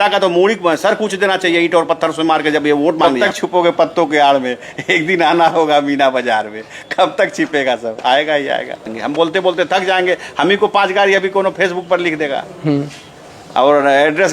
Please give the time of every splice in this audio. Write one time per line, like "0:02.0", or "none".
0:03.1
0:08.9

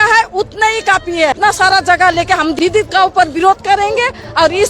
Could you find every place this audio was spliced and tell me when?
0:01.4
0:02.6

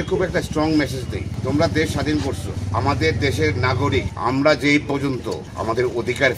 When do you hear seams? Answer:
0:01.3
0:02.5
0:04.1
0:05.4

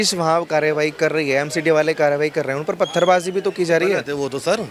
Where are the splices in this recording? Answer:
none

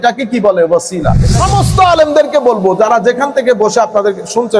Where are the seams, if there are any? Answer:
0:01.2

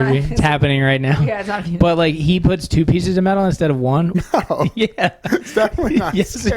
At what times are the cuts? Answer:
0:04.1

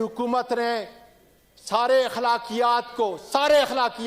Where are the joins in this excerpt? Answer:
none

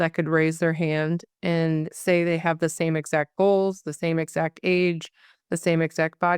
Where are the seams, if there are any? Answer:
0:01.6

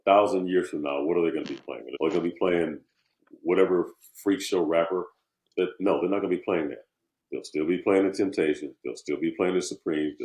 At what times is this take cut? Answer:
0:01.8

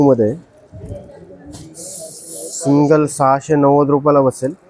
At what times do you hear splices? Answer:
none

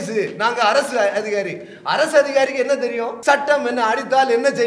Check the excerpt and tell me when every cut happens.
0:03.1

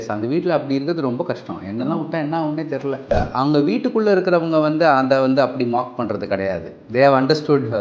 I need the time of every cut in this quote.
0:03.1

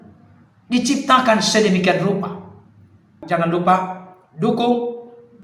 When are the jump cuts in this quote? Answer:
0:03.2

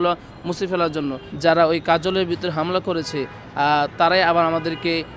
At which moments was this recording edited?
0:01.2

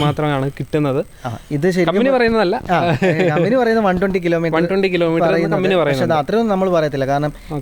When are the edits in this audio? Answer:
none

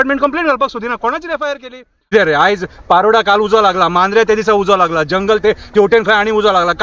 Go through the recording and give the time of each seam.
0:01.9

